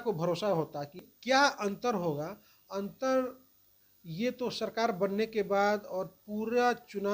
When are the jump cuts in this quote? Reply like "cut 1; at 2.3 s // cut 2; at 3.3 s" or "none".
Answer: cut 1; at 1.1 s